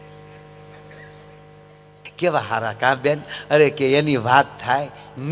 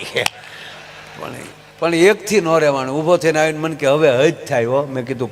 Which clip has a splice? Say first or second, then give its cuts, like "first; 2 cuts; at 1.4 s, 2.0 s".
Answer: first; 1 cut; at 2.0 s